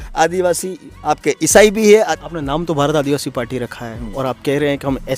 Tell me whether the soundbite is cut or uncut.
cut